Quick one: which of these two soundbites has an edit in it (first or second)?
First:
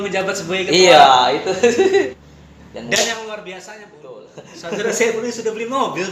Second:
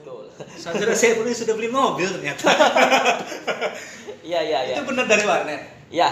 first